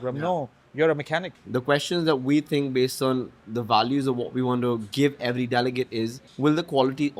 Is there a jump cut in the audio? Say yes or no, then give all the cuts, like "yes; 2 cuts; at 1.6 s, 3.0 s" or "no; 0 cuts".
yes; 2 cuts; at 1.4 s, 6.2 s